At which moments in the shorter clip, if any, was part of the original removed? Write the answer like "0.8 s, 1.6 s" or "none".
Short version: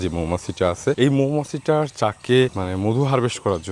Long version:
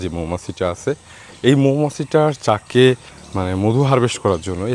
1.0 s, 2.6 s